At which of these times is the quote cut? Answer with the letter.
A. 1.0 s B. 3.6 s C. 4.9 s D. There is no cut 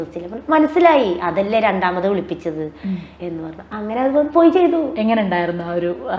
D